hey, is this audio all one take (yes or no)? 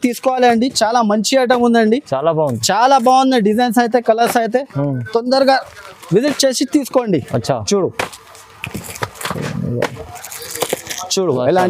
yes